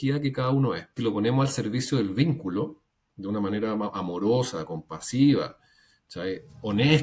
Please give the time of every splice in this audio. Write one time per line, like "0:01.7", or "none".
0:01.0